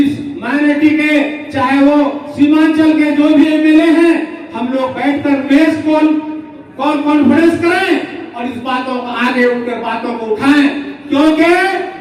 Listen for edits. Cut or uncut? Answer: uncut